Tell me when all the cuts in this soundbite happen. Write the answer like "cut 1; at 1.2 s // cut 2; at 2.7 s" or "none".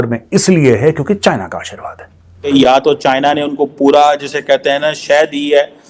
cut 1; at 2.5 s